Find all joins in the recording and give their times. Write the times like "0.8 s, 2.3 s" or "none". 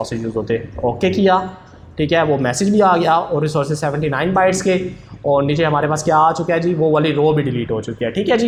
none